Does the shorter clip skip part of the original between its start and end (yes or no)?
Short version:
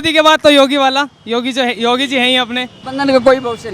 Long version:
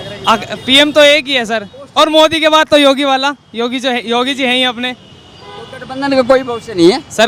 yes